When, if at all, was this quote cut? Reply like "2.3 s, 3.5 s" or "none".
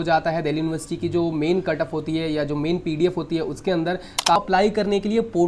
4.4 s